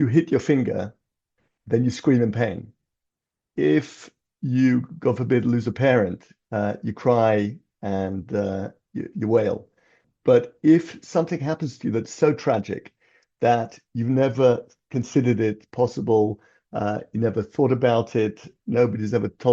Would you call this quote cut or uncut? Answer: cut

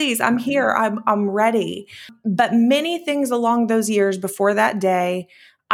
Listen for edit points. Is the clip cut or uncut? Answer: cut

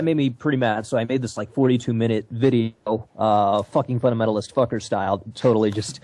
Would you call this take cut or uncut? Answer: uncut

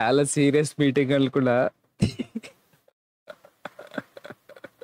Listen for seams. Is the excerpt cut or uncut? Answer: uncut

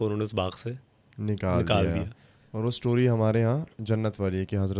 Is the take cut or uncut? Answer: uncut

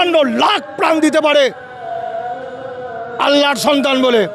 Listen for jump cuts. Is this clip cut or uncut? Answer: uncut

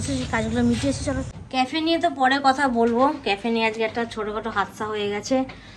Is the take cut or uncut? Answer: cut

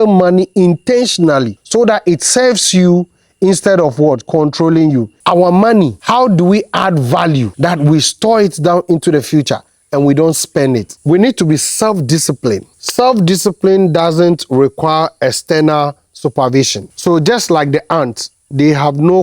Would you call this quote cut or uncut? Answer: cut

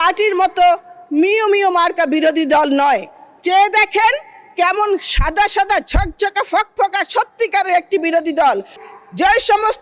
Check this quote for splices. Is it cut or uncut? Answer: cut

